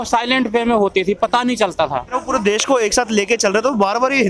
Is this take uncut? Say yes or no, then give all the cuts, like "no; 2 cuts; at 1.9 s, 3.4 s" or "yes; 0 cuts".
no; 1 cut; at 2.1 s